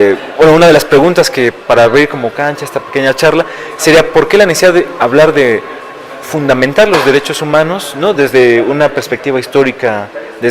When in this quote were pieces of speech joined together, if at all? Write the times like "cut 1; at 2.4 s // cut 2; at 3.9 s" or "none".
cut 1; at 7.3 s